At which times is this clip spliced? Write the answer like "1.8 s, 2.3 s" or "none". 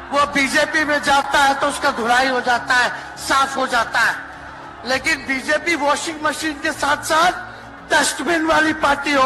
none